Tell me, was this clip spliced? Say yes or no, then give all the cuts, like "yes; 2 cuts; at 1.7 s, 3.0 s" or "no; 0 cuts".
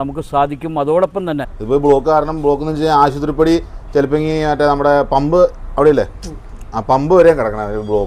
yes; 1 cut; at 1.5 s